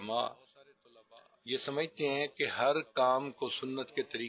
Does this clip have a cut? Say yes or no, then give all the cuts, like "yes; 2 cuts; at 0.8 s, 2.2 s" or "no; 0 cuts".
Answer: no; 0 cuts